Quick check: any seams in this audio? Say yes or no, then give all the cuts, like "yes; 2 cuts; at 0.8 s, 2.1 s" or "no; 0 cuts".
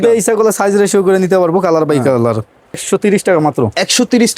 yes; 1 cut; at 2.8 s